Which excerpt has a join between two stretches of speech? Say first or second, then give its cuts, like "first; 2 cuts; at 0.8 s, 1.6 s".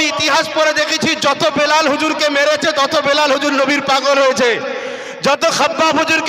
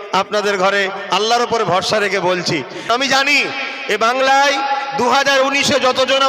second; 1 cut; at 2.9 s